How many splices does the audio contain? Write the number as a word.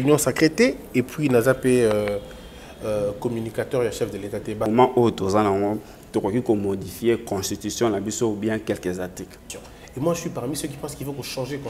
two